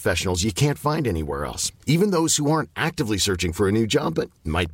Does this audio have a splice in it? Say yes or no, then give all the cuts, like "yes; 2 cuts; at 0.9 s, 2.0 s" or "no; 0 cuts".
no; 0 cuts